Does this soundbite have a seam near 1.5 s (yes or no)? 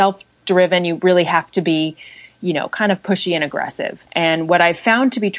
no